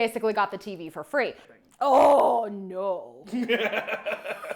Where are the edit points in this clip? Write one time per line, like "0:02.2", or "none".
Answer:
0:01.4